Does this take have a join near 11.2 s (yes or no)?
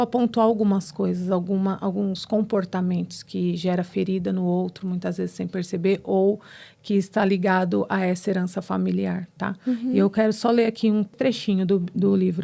yes